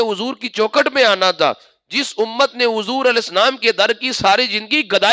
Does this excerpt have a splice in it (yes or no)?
no